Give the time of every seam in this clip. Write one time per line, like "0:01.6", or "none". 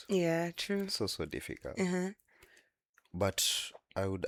none